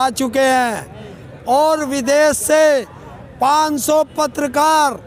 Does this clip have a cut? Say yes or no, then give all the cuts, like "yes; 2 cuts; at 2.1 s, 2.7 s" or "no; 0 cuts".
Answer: no; 0 cuts